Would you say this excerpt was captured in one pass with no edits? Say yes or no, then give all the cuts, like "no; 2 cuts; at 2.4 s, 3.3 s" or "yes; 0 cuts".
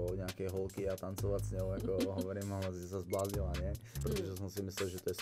no; 1 cut; at 4.0 s